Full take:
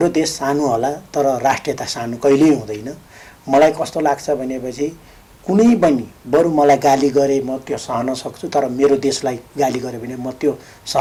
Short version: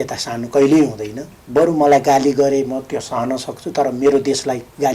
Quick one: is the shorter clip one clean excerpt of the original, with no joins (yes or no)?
no